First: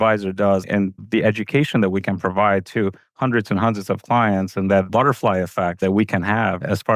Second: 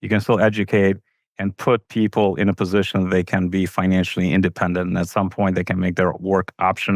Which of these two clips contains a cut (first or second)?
first